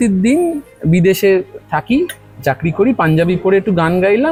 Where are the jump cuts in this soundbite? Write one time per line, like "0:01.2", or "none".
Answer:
none